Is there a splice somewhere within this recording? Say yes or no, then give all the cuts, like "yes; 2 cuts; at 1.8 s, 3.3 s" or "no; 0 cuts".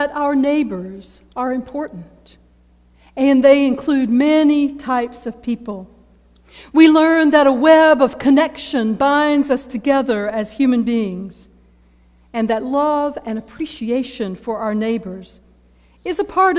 yes; 1 cut; at 13.1 s